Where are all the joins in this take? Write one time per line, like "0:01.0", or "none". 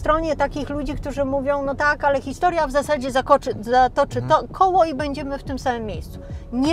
none